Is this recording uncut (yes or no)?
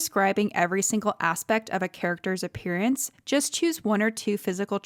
yes